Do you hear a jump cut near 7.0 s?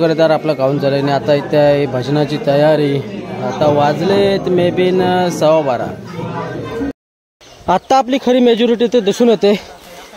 yes; 1 cut; at 7.0 s

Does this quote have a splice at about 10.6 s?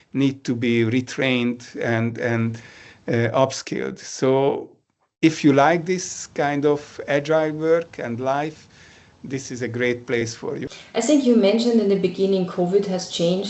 yes; 1 cut; at 10.6 s

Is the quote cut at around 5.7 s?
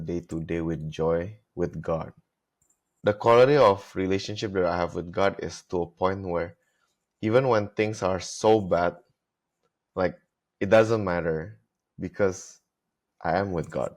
no; 1 cut; at 2.9 s

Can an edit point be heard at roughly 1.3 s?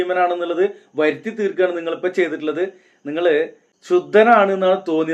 no; 1 cut; at 3.7 s

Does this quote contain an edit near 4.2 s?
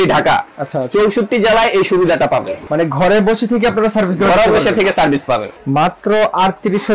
no; 2 cuts; at 2.6 s, 5.5 s

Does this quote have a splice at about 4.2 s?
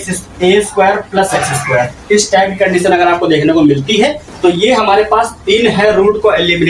yes; 1 cut; at 4.2 s

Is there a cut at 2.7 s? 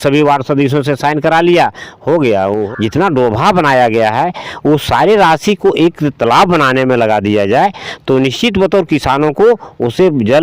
yes; 1 cut; at 2.7 s

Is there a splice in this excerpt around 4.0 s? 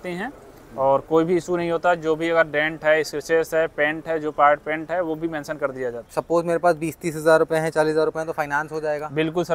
no; 1 cut; at 6.2 s

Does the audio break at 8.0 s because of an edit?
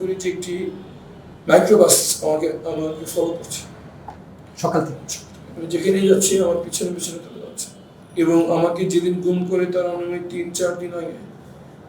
yes; 1 cut; at 8.0 s

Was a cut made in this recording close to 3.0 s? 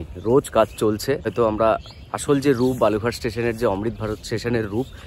no; 1 cut; at 1.3 s

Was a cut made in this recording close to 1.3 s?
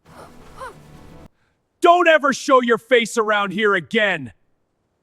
yes; 1 cut; at 1.3 s

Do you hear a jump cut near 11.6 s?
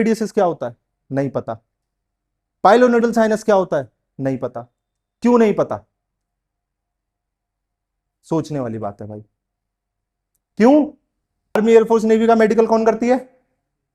yes; 1 cut; at 11.6 s

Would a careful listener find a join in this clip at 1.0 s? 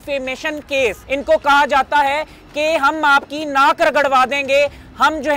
yes; 1 cut; at 1.0 s

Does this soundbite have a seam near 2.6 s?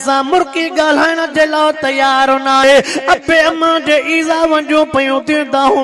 yes; 1 cut; at 2.6 s

